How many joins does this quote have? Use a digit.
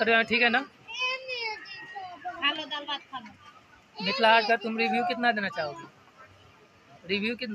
0